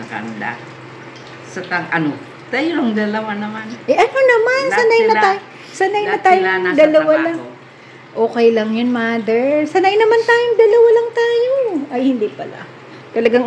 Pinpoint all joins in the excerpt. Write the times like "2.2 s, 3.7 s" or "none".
none